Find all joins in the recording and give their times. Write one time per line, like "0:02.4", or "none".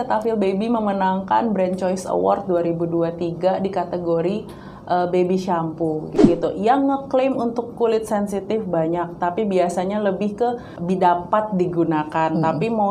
0:06.1
0:10.7